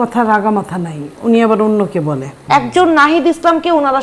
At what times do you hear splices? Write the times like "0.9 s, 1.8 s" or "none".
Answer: 2.3 s